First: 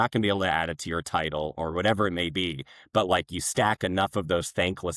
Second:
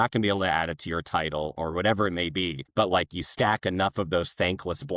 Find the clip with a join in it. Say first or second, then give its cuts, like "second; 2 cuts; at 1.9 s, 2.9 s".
second; 1 cut; at 2.6 s